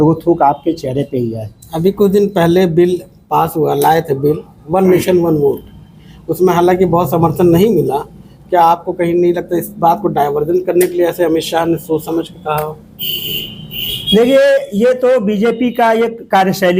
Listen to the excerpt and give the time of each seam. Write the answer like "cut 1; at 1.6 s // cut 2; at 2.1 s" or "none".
none